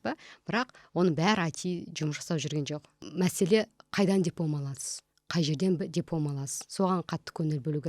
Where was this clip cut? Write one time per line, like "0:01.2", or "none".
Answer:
0:02.9